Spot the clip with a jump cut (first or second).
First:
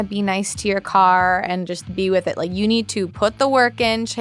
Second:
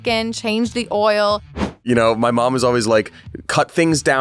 second